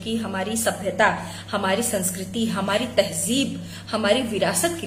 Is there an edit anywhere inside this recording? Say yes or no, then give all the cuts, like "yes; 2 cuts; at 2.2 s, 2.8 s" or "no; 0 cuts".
no; 0 cuts